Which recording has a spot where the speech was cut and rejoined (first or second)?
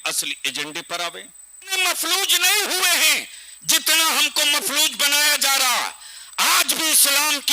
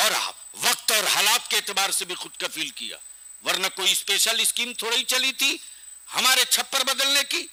first